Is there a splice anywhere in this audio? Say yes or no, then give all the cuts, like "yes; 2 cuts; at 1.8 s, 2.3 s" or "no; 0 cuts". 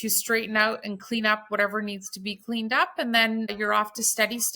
yes; 1 cut; at 3.5 s